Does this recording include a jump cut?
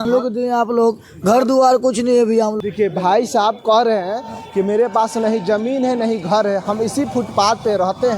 yes; 1 cut; at 2.6 s

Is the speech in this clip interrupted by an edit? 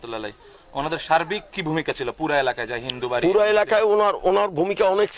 no; 0 cuts

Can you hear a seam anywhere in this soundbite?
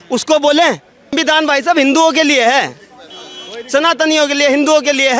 yes; 1 cut; at 1.1 s

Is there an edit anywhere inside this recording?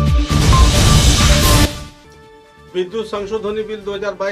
no; 0 cuts

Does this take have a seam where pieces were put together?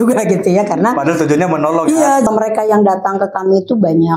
yes; 1 cut; at 2.3 s

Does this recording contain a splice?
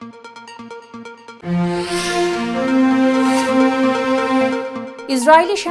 no; 0 cuts

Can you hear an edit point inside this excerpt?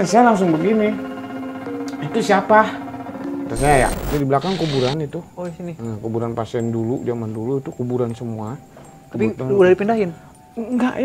yes; 1 cut; at 4.0 s

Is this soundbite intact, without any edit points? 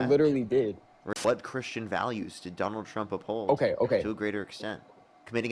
no; 1 cut; at 1.0 s

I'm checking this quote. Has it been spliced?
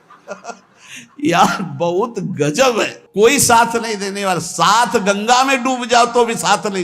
yes; 1 cut; at 3.0 s

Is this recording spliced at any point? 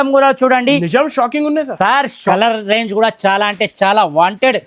yes; 1 cut; at 2.2 s

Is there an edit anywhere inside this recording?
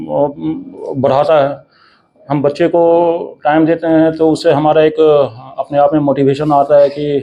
no; 0 cuts

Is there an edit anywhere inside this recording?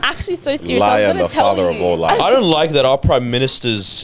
yes; 1 cut; at 2.2 s

